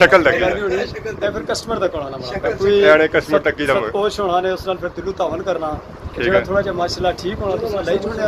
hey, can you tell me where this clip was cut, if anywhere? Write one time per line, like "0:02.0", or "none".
none